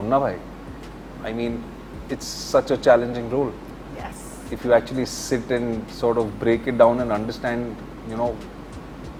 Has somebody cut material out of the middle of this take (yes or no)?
no